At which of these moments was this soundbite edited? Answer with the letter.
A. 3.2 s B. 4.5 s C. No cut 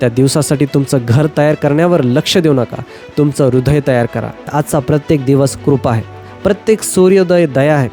B